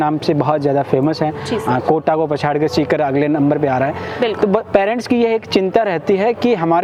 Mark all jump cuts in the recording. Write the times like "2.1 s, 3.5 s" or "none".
none